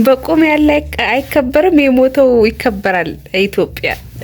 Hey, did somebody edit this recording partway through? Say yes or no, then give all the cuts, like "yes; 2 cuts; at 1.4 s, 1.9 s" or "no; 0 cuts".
no; 0 cuts